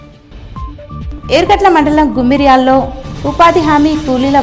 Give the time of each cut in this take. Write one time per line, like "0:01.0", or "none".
0:01.0